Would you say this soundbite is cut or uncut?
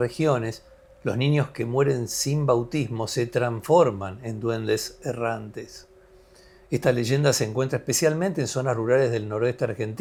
uncut